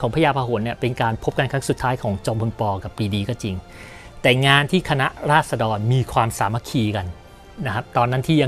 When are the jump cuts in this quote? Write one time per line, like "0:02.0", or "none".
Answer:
none